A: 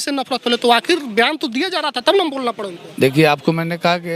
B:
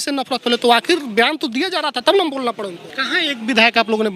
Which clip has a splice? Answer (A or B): B